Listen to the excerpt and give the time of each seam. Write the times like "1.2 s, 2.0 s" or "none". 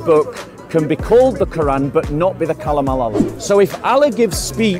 3.3 s